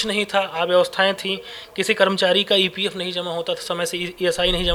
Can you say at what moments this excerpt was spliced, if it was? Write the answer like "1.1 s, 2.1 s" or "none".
none